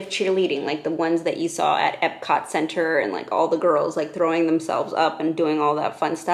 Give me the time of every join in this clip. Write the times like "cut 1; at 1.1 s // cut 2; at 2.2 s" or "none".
none